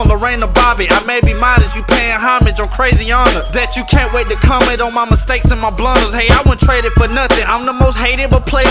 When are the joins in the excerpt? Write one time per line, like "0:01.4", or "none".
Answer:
0:03.7